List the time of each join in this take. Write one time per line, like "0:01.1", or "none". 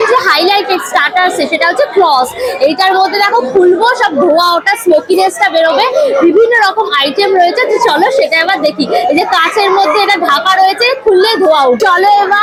none